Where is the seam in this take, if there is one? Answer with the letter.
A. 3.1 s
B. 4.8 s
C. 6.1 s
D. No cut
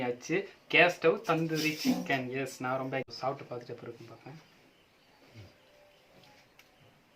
A